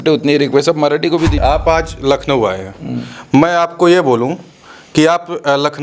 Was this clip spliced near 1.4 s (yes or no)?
yes